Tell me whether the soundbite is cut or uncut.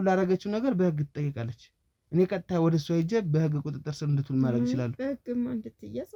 uncut